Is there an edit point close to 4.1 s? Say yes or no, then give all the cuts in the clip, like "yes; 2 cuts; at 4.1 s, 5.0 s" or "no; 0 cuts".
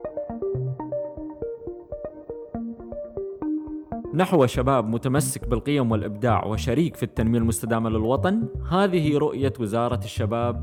yes; 1 cut; at 4.1 s